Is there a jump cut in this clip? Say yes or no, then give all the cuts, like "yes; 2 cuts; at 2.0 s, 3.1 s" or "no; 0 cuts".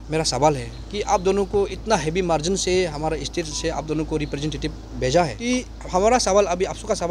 yes; 1 cut; at 5.4 s